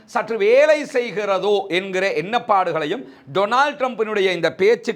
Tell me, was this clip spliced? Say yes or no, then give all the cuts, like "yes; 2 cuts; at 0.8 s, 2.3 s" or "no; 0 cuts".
no; 0 cuts